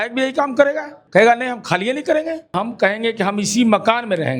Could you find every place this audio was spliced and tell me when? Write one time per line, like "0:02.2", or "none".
0:00.9
0:02.5